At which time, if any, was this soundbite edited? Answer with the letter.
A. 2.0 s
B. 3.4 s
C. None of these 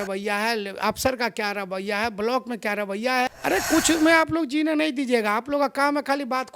B